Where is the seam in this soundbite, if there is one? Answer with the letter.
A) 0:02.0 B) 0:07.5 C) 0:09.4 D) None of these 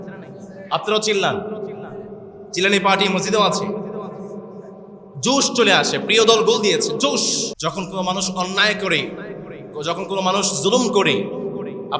B